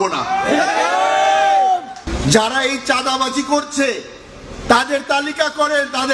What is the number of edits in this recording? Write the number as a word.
one